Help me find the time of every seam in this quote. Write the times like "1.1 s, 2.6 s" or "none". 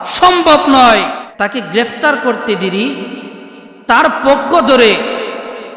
1.2 s

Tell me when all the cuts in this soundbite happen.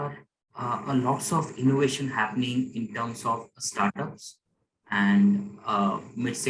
none

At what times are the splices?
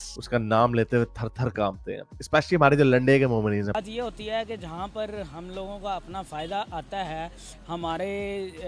3.7 s

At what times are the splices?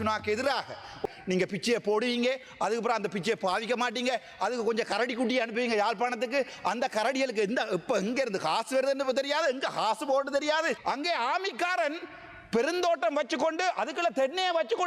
1.0 s, 10.8 s

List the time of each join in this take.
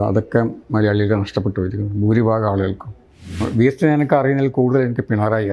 3.4 s

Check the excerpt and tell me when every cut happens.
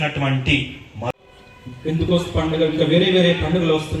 1.1 s

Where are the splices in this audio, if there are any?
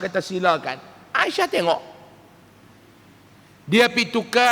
none

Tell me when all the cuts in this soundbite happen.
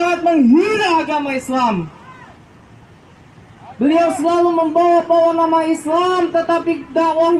none

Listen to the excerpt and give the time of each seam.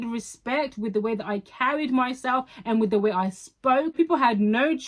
4.0 s

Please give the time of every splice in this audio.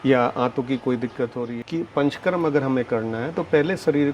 1.5 s

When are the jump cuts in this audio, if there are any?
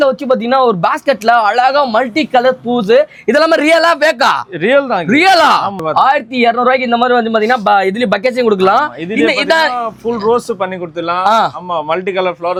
none

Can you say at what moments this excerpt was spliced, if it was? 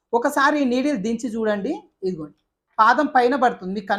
none

